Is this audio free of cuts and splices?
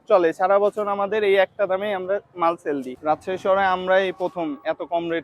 no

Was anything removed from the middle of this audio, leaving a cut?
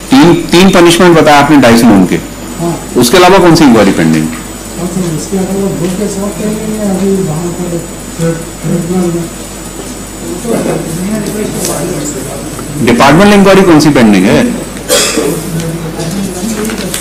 no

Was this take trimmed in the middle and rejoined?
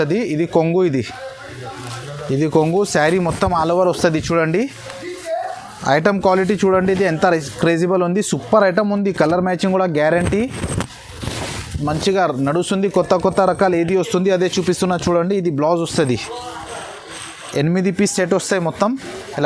no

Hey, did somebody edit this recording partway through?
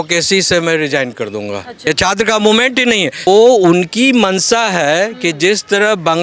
yes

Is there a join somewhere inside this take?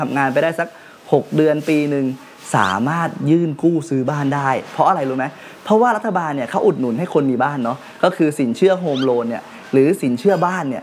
no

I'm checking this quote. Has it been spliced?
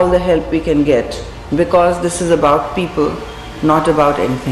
no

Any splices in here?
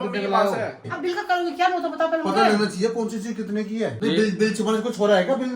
yes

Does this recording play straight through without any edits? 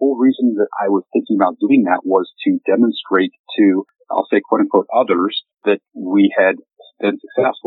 yes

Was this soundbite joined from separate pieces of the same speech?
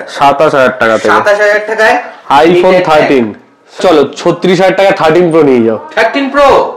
yes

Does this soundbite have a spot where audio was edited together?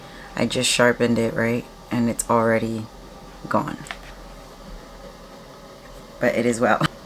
no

